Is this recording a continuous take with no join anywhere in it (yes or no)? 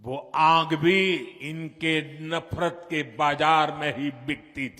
no